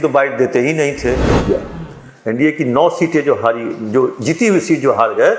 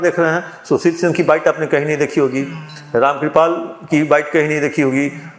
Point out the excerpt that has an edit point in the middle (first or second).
first